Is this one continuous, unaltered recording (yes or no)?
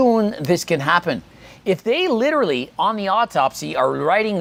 yes